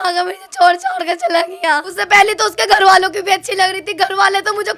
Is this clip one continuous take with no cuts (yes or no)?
no